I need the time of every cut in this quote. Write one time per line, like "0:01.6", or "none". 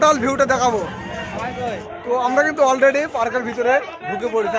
0:01.9